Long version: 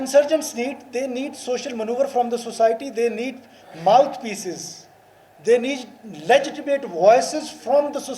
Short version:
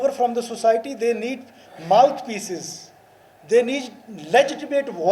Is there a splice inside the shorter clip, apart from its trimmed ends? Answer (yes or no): no